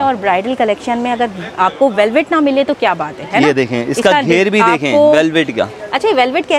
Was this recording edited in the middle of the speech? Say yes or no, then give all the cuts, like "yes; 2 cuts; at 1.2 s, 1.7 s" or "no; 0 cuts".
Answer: no; 0 cuts